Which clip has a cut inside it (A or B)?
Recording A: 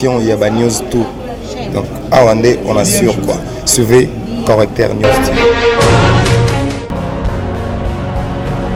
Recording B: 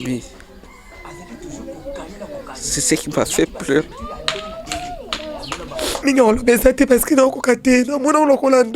B